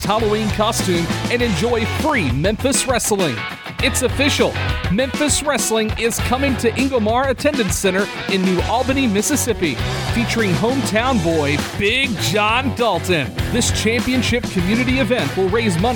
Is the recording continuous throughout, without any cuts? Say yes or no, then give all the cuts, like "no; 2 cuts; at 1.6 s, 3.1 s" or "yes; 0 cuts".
yes; 0 cuts